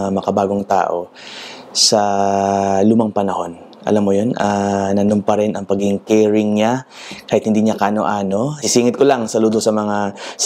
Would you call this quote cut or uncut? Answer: cut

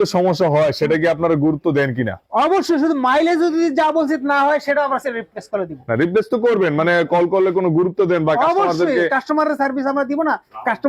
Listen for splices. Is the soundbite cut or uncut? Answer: uncut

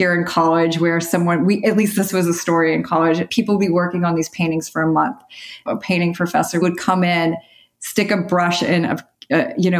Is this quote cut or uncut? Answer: cut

